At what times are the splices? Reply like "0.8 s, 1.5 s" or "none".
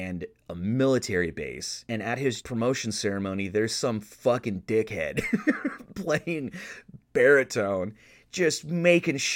1.7 s, 2.4 s